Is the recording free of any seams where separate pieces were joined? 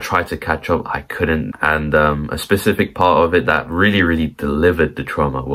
no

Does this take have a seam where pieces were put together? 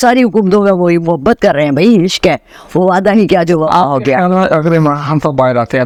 no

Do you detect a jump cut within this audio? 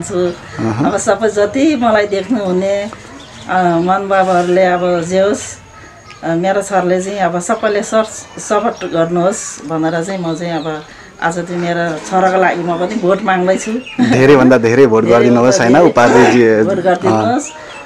no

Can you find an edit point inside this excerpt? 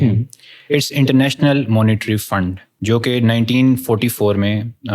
yes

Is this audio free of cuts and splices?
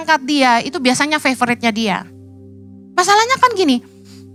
yes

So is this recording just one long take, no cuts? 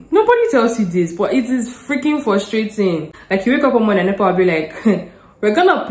no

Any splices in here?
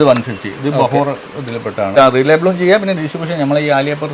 yes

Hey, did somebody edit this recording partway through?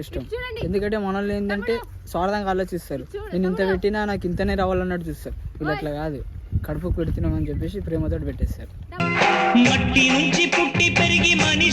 no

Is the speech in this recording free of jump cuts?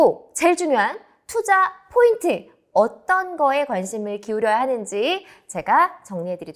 yes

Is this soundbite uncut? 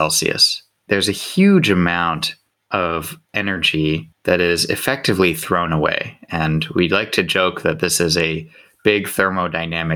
no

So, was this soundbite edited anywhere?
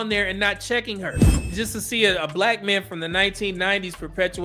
yes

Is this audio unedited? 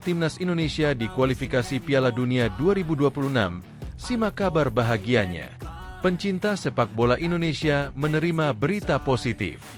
yes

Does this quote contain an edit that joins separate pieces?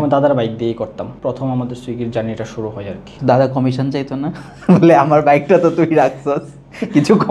yes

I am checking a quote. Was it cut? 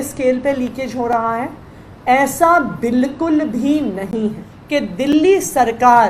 yes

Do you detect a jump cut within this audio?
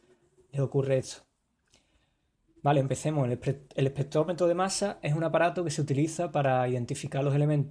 yes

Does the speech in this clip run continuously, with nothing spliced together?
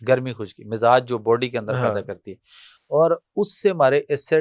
yes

